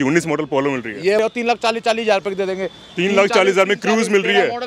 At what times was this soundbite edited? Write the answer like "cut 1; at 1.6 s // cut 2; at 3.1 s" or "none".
cut 1; at 1.2 s